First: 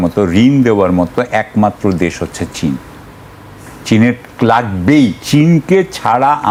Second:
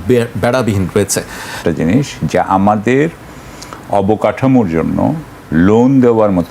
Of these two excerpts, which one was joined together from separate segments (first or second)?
second